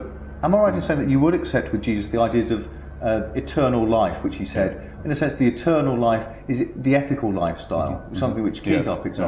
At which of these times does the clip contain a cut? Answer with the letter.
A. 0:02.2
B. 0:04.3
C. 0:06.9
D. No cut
A